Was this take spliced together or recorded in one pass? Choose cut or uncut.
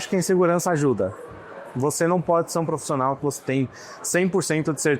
uncut